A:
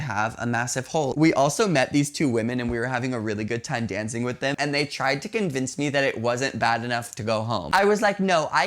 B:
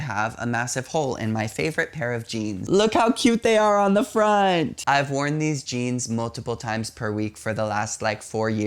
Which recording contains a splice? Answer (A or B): A